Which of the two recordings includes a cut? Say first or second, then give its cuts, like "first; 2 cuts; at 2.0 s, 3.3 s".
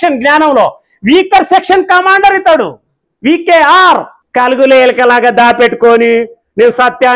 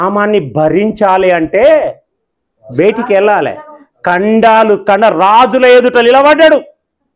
first; 1 cut; at 4.2 s